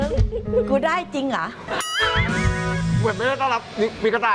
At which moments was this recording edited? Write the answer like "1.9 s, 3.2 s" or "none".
1.7 s